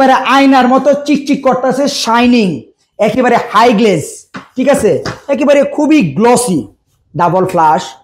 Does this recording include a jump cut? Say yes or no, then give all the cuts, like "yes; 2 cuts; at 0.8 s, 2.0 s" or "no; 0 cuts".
no; 0 cuts